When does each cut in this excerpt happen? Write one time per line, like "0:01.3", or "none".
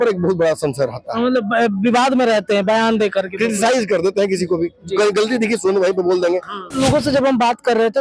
0:06.7